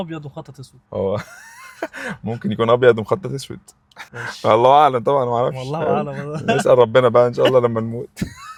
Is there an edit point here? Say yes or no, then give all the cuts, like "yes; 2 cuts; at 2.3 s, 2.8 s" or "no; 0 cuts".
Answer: no; 0 cuts